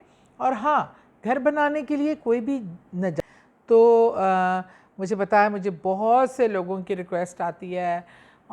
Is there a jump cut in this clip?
yes; 1 cut; at 3.2 s

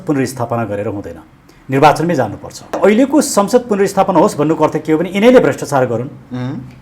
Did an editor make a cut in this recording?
yes; 1 cut; at 2.8 s

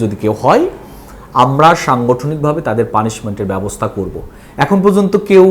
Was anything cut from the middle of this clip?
no; 0 cuts

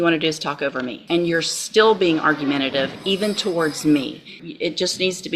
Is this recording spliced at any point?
yes; 2 cuts; at 1.0 s, 4.4 s

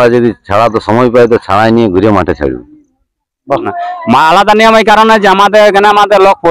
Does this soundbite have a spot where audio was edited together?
yes; 1 cut; at 3.8 s

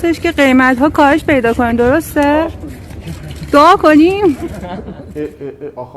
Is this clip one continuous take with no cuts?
no; 1 cut; at 5.0 s

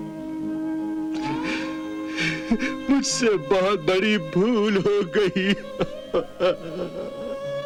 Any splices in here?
no; 0 cuts

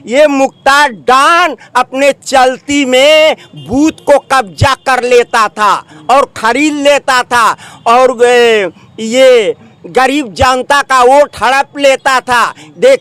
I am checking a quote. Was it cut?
no; 0 cuts

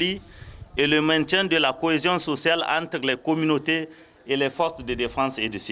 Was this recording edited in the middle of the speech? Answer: no; 0 cuts

